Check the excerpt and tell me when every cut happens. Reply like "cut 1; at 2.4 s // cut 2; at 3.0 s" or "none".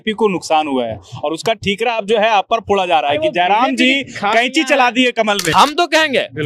cut 1; at 5.5 s